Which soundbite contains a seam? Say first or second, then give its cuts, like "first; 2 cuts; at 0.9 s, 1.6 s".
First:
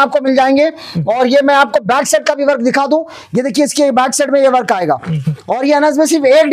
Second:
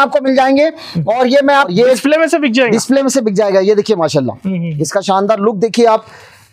second; 1 cut; at 1.7 s